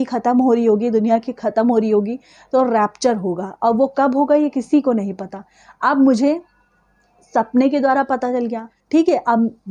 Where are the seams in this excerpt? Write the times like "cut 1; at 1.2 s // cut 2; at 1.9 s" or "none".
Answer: cut 1; at 8.7 s